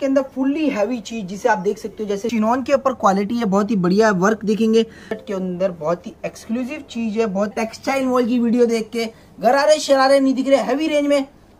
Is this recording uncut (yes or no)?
no